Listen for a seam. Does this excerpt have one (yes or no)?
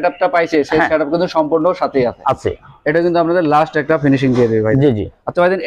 no